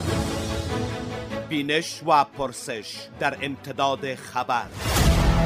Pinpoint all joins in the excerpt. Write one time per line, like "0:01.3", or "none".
0:01.3